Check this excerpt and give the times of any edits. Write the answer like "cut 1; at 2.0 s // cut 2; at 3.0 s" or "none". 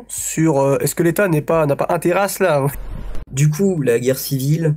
cut 1; at 2.7 s